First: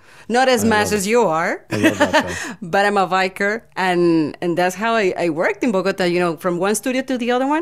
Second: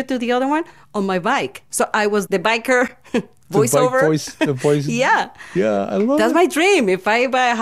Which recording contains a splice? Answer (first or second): second